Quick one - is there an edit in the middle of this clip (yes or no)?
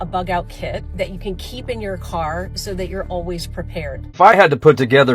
yes